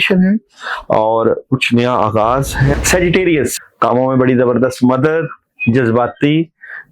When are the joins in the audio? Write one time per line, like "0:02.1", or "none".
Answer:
0:02.8
0:03.5